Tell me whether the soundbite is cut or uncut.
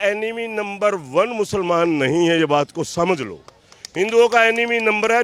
uncut